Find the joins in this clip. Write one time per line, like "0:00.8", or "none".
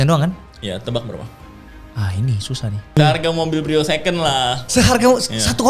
0:02.9